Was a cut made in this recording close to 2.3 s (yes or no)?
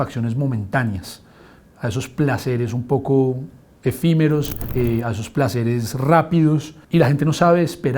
no